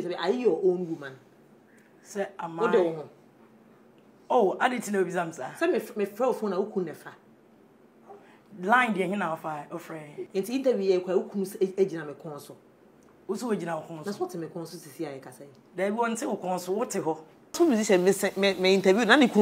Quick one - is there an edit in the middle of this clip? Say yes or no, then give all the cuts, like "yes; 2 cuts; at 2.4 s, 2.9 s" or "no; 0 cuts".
yes; 2 cuts; at 10.2 s, 17.6 s